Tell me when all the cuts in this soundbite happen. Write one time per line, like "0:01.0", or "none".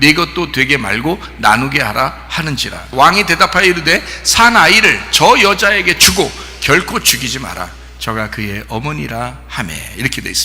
0:02.7